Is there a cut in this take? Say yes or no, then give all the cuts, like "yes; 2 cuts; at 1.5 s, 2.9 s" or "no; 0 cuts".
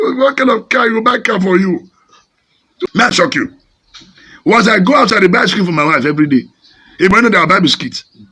yes; 1 cut; at 2.9 s